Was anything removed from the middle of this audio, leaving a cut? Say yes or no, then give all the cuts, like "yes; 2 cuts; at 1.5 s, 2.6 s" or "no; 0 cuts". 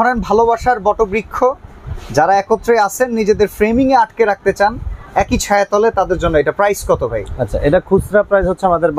no; 0 cuts